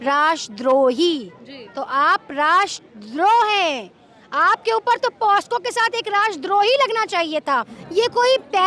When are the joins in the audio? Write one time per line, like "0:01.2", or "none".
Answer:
0:07.8